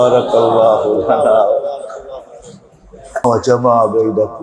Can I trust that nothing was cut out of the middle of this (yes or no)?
no